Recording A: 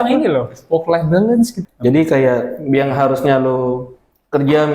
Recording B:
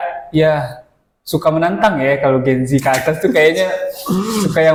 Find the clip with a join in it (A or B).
A